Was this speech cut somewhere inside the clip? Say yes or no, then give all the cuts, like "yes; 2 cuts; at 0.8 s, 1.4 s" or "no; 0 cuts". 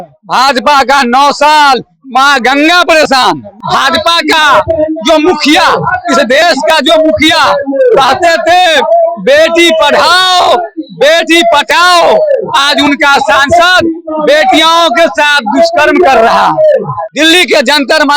yes; 2 cuts; at 3.6 s, 17.0 s